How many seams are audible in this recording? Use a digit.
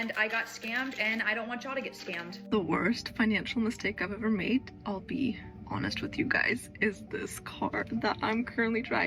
1